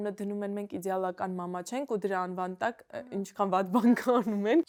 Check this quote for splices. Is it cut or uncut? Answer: uncut